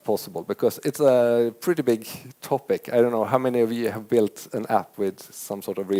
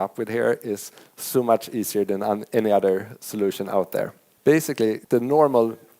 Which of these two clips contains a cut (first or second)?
second